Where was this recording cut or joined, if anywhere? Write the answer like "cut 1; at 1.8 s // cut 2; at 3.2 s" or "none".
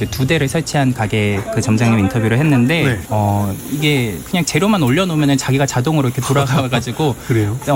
none